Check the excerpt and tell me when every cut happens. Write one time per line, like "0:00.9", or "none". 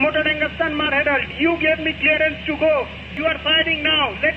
0:03.1